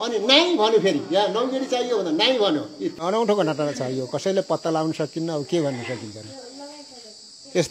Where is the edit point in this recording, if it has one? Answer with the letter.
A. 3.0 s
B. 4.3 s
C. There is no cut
A